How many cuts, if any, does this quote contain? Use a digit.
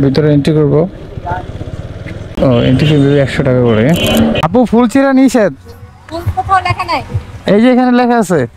2